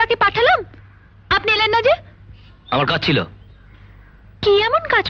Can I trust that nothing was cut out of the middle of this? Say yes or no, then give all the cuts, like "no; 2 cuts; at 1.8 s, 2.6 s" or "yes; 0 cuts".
yes; 0 cuts